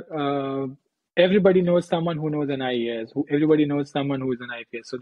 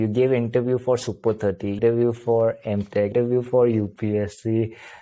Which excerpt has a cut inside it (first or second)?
second